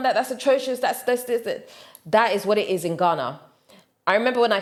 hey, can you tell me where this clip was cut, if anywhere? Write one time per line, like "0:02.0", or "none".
none